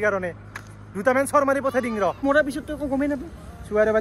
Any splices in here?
yes; 1 cut; at 2.2 s

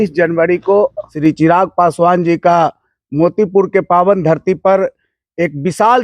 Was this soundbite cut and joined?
yes; 1 cut; at 1.1 s

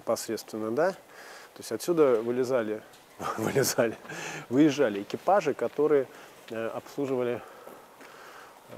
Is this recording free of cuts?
yes; 0 cuts

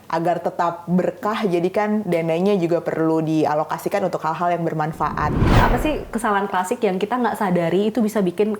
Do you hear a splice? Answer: yes; 1 cut; at 5.6 s

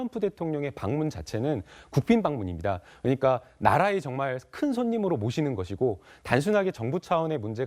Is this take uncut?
yes; 0 cuts

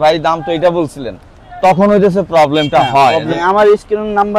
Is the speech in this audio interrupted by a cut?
yes; 1 cut; at 3.4 s

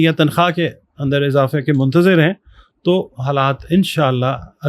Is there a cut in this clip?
no; 0 cuts

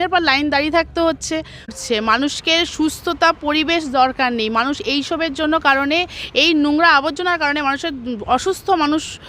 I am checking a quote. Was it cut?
yes; 1 cut; at 1.8 s

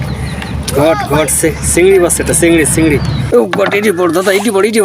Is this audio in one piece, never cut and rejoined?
no; 1 cut; at 3.2 s

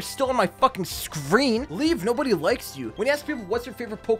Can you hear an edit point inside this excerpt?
yes; 2 cuts; at 1.7 s, 2.8 s

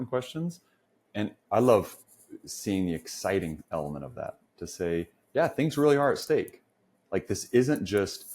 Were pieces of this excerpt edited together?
yes; 1 cut; at 1.3 s

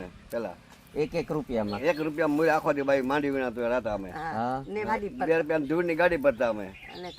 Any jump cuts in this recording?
yes; 1 cut; at 4.9 s

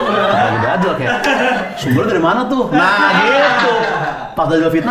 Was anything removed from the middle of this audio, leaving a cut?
no; 0 cuts

